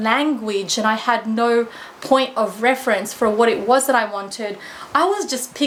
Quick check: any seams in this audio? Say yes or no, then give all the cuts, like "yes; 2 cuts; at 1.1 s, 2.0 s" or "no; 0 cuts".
no; 0 cuts